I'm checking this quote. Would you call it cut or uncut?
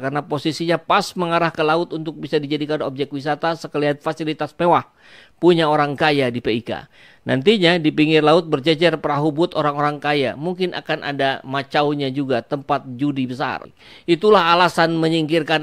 cut